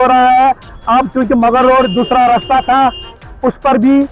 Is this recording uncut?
yes; 0 cuts

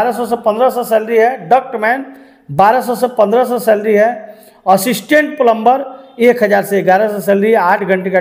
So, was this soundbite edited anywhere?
no; 0 cuts

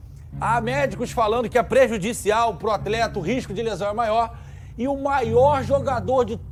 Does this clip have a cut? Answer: no; 0 cuts

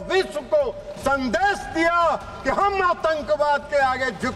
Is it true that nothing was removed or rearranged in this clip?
yes; 0 cuts

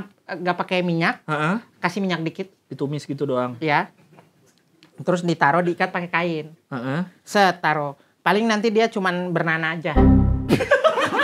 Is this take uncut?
yes; 0 cuts

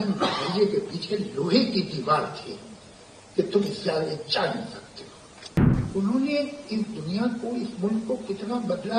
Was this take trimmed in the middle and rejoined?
yes; 1 cut; at 5.8 s

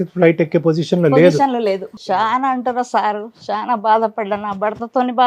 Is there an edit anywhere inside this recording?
yes; 1 cut; at 1.9 s

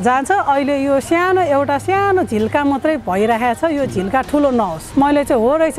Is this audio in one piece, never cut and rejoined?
no; 1 cut; at 4.8 s

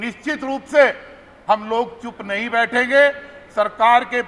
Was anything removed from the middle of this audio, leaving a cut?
no; 0 cuts

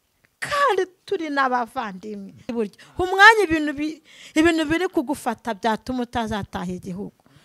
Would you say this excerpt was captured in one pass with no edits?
no; 1 cut; at 2.5 s

